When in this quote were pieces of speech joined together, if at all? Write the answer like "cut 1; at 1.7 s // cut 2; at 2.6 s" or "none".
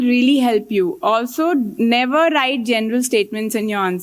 none